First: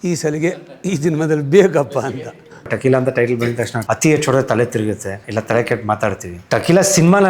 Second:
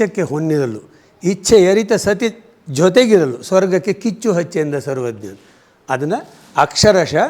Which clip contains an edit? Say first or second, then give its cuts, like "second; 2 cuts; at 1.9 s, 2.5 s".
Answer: first; 4 cuts; at 2.7 s, 3.7 s, 5.2 s, 6.3 s